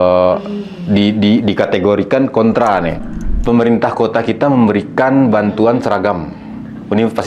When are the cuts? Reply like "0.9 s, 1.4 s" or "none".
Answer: 3.0 s